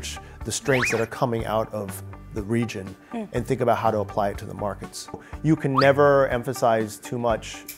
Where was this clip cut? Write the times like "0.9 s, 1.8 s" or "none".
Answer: 5.2 s